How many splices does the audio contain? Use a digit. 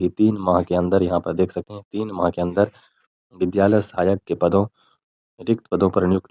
0